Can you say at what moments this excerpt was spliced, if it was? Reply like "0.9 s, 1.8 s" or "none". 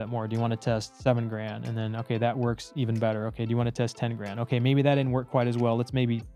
none